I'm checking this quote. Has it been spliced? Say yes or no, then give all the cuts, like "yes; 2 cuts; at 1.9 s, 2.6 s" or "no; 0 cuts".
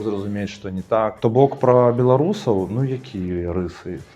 yes; 1 cut; at 1.2 s